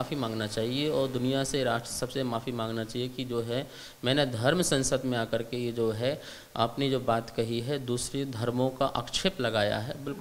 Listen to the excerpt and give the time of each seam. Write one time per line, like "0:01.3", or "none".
none

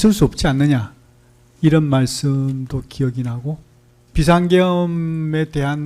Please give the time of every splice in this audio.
0:04.1

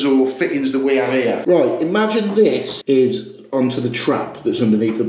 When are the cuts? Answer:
0:01.4
0:02.7

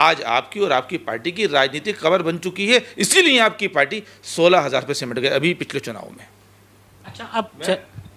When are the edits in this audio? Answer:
none

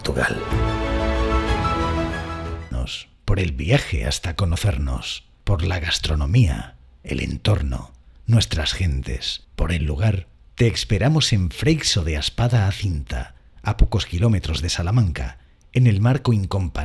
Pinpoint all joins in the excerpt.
0:02.7

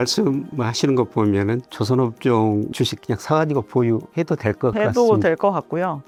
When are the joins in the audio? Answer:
none

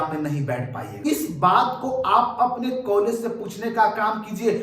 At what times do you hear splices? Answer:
0:01.1

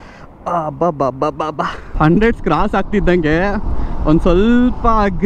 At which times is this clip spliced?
0:02.0

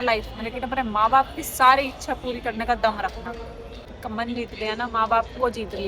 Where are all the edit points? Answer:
0:03.9

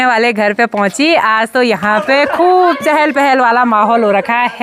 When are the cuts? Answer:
none

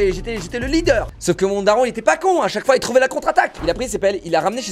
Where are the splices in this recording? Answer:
0:01.2
0:03.6

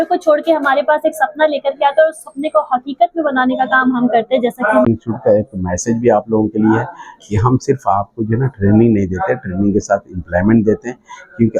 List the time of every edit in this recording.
0:04.9

